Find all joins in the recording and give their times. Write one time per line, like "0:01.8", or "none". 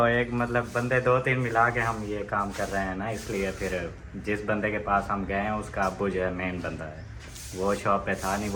none